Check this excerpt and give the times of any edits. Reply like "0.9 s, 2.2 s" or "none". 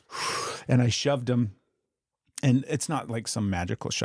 none